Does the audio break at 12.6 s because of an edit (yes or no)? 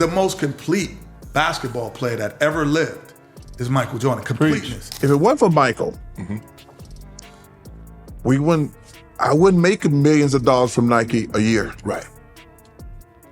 yes